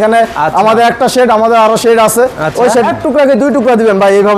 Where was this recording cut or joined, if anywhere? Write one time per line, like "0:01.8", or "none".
0:02.9